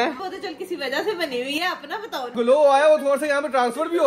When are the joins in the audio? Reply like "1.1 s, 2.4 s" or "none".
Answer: 2.3 s

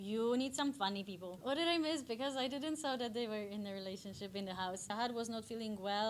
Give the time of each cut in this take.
1.3 s, 4.9 s

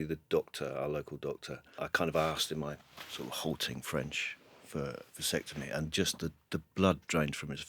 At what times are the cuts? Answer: 1.7 s

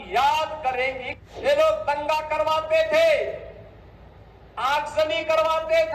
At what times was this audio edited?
1.1 s

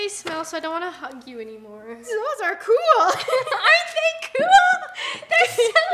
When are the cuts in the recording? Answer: 2.0 s

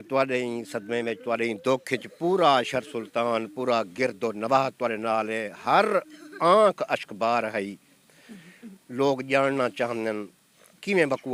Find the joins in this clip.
none

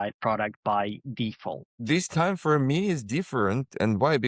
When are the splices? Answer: 1.7 s

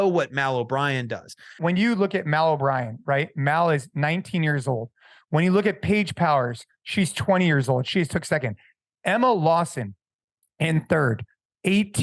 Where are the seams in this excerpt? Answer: 1.5 s

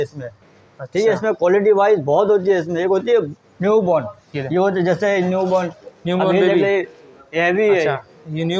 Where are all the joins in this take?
none

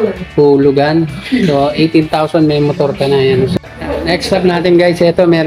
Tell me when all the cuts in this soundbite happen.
3.5 s

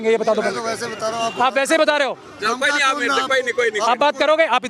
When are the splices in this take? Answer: none

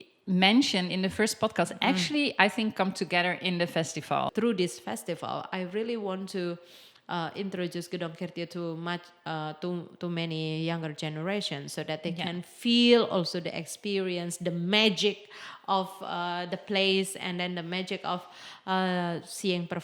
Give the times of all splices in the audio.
4.3 s

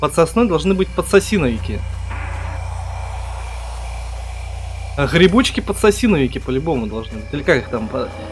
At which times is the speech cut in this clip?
none

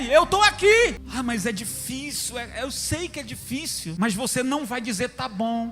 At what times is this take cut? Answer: 1.0 s, 3.9 s

